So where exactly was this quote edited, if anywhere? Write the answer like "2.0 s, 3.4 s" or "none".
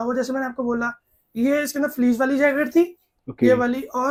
none